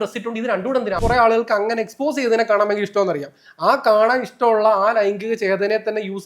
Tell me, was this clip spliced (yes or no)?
yes